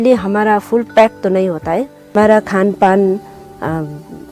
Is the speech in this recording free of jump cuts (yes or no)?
no